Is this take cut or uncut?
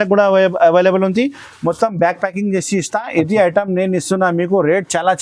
uncut